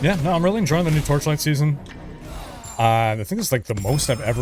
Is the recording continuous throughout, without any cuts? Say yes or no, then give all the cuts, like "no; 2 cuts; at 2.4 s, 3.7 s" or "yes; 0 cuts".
no; 1 cut; at 2.4 s